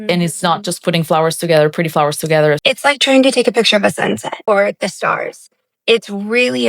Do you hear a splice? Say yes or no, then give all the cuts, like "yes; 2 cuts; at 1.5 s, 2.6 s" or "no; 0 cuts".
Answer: yes; 2 cuts; at 2.6 s, 4.4 s